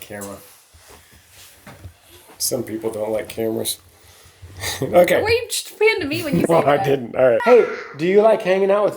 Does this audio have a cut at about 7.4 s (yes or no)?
yes